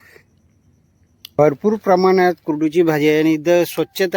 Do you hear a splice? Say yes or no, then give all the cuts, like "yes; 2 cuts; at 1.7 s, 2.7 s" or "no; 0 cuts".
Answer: yes; 1 cut; at 1.4 s